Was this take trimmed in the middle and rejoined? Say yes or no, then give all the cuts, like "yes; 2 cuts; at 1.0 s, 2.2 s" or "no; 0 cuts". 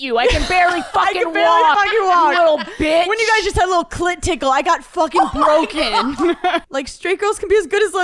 yes; 1 cut; at 6.6 s